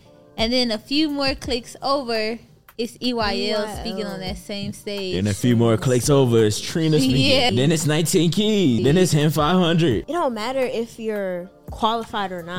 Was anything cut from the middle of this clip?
yes; 3 cuts; at 7.5 s, 8.8 s, 10.0 s

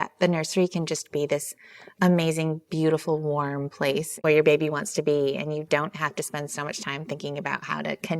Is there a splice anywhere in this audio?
yes; 1 cut; at 4.1 s

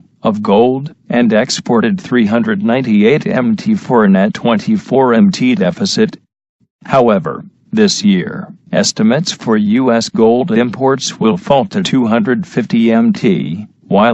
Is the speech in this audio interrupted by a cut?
yes; 1 cut; at 10.4 s

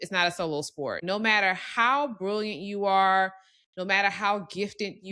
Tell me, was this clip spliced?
yes; 1 cut; at 1.0 s

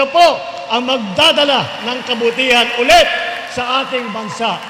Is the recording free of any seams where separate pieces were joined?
yes; 0 cuts

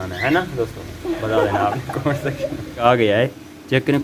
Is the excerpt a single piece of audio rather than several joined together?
no; 1 cut; at 2.8 s

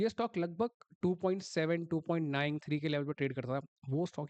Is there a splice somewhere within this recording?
no; 0 cuts

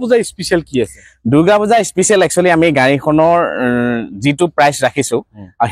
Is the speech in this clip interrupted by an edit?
no; 0 cuts

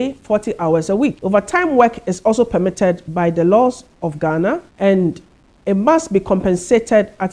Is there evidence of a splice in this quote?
yes; 2 cuts; at 1.2 s, 4.7 s

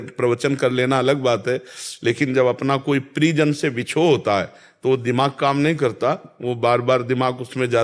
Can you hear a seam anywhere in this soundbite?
no; 0 cuts

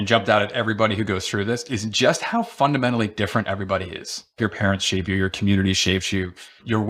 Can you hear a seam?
yes; 1 cut; at 4.4 s

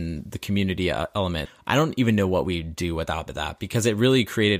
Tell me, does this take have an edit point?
yes; 1 cut; at 1.5 s

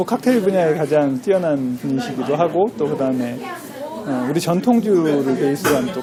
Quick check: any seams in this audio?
no; 0 cuts

